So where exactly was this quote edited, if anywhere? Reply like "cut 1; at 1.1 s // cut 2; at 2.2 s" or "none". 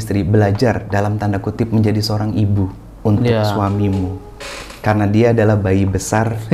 none